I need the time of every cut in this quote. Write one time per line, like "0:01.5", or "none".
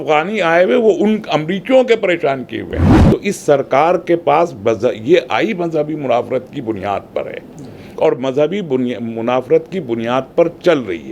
0:02.9